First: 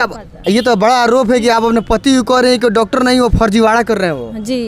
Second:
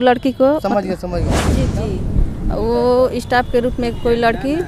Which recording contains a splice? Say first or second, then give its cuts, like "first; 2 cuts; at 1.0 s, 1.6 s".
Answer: second; 1 cut; at 1.5 s